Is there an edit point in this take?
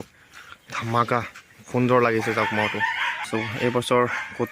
yes; 1 cut; at 3.2 s

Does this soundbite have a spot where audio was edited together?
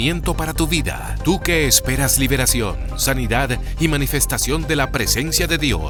no; 0 cuts

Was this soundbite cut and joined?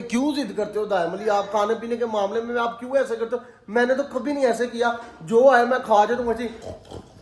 no; 0 cuts

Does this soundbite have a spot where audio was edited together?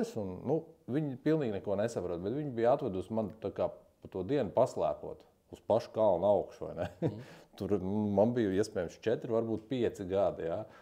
no; 0 cuts

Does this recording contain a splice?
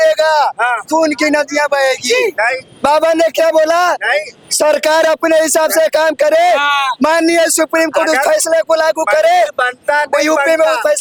no; 0 cuts

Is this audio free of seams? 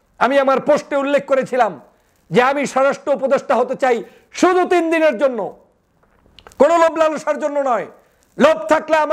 yes; 0 cuts

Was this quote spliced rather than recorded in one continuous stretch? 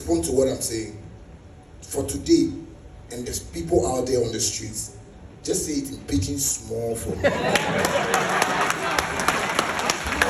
no; 0 cuts

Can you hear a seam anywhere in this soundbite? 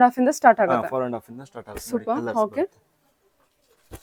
no; 0 cuts

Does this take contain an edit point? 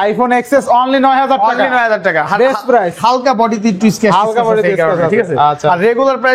no; 0 cuts

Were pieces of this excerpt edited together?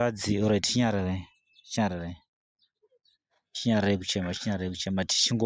no; 0 cuts

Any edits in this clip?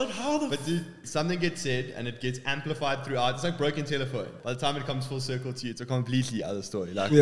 yes; 2 cuts; at 1.0 s, 4.3 s

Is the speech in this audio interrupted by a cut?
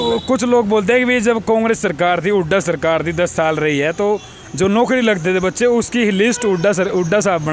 no; 0 cuts

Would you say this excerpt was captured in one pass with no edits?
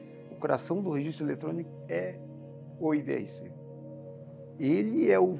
yes; 0 cuts

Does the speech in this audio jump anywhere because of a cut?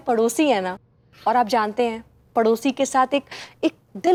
no; 0 cuts

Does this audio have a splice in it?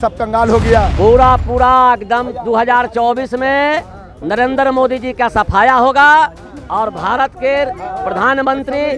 yes; 1 cut; at 0.9 s

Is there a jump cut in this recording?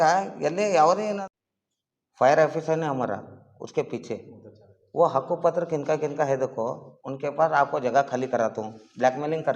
yes; 1 cut; at 1.3 s

